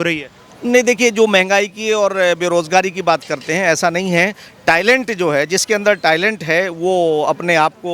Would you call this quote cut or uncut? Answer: uncut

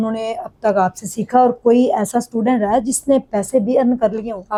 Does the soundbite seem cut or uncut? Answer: uncut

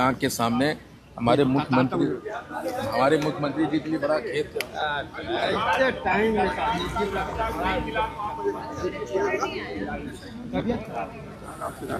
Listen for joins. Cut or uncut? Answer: uncut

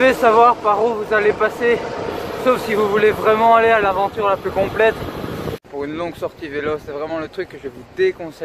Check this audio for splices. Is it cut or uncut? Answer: cut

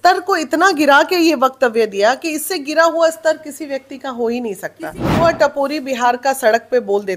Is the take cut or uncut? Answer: cut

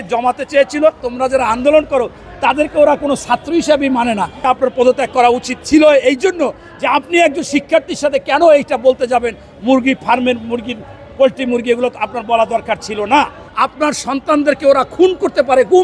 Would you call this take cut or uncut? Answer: cut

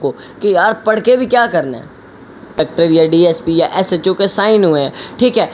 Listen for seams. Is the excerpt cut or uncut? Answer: cut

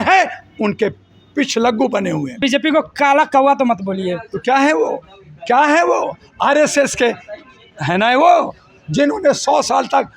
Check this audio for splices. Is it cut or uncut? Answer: cut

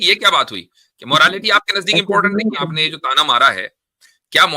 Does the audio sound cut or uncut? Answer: cut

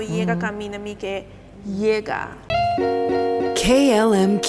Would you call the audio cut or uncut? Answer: cut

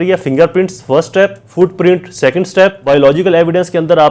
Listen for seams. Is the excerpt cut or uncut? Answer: cut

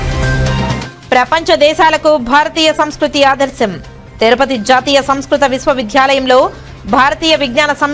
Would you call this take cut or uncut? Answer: cut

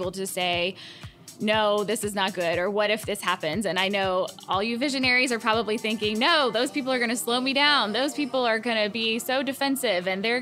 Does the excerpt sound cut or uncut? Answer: uncut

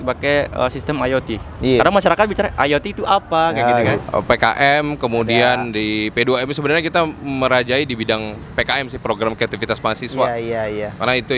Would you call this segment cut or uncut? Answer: cut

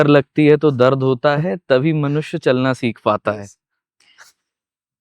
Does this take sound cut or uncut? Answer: uncut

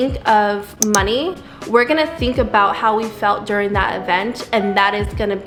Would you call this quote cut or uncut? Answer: uncut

